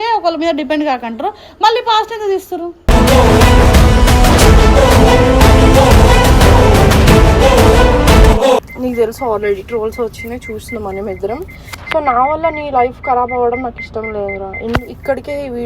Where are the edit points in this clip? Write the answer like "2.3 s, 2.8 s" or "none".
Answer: 8.7 s

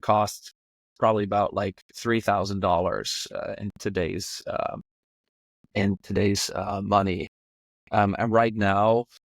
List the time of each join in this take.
none

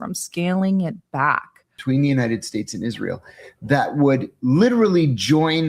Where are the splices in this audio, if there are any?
1.7 s

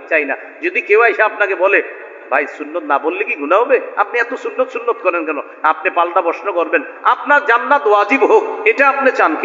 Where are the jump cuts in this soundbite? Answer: none

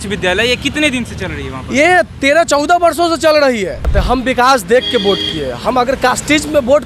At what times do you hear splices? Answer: 3.9 s

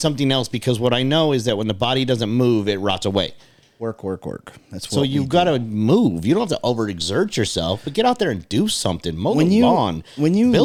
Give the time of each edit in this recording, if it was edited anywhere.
none

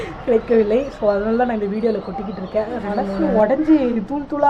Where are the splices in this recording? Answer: 3.1 s

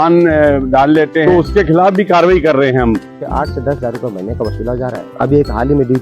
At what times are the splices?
1.2 s, 3.2 s, 5.0 s

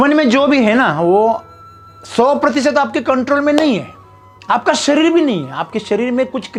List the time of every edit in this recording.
none

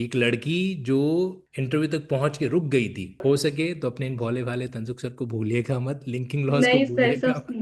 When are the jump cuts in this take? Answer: 1.4 s, 3.2 s

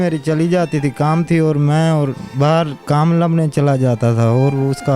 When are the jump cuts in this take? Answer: 2.8 s

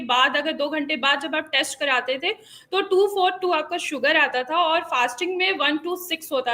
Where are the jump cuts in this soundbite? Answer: none

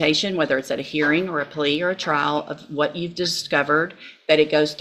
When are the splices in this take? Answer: none

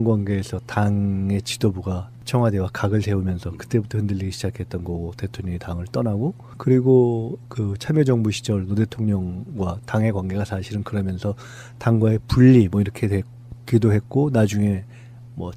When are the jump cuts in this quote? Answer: 1.0 s

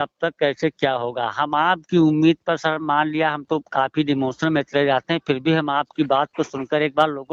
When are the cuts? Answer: none

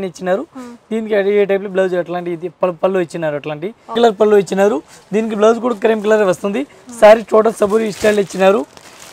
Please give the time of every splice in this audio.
3.9 s

